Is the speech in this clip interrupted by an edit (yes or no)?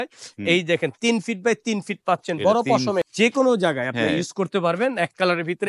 yes